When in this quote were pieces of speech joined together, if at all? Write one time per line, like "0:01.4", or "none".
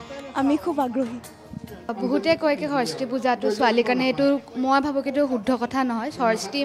0:01.9